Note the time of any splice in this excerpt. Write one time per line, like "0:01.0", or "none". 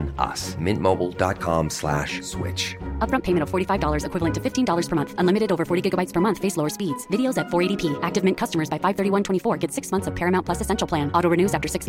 none